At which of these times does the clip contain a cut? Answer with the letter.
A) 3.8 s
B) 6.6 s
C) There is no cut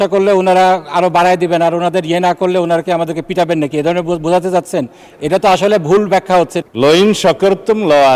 B